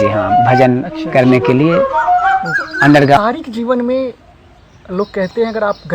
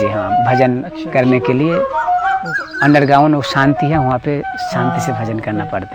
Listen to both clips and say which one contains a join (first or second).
first